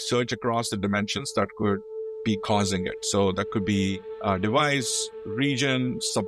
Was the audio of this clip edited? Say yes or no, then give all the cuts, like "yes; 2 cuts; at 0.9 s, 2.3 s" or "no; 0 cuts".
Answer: yes; 1 cut; at 4.1 s